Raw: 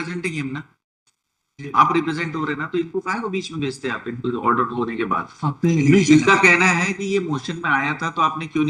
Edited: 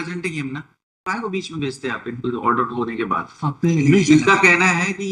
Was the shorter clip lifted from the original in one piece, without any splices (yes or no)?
no